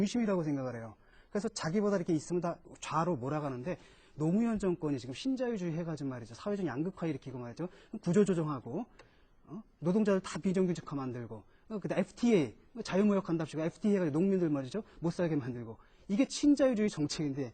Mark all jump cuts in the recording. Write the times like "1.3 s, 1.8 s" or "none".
6.9 s